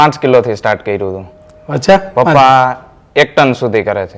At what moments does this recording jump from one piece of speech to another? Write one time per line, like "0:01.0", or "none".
none